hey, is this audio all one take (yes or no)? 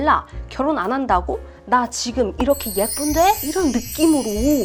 yes